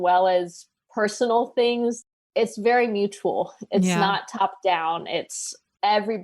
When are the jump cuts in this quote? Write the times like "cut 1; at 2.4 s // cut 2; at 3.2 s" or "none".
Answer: cut 1; at 2.0 s